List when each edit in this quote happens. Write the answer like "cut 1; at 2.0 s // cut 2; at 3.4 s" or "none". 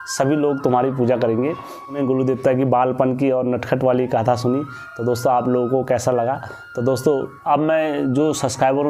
cut 1; at 2.0 s